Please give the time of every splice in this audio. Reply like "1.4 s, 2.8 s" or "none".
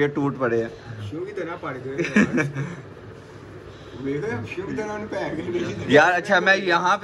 none